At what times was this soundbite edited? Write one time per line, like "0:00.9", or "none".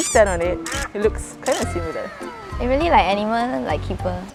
none